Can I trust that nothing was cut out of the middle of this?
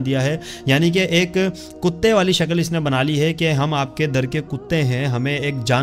yes; 0 cuts

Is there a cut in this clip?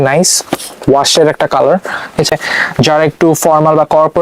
yes; 1 cut; at 2.3 s

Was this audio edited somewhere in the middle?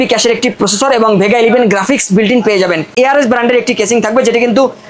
yes; 1 cut; at 2.9 s

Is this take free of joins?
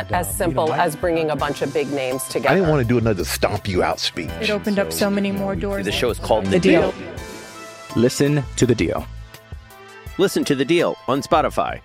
yes; 0 cuts

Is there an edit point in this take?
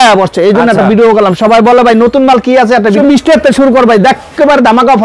yes; 1 cut; at 3.0 s

